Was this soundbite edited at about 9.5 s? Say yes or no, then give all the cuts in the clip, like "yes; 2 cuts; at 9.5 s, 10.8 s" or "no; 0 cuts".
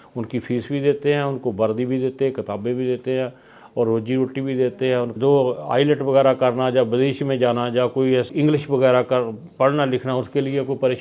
no; 2 cuts; at 5.1 s, 8.3 s